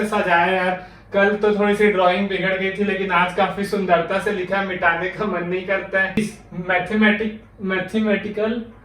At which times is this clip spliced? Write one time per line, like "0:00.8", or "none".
0:06.2